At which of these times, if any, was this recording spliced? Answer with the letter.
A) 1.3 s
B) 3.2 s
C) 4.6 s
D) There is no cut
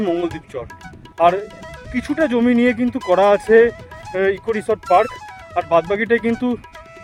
D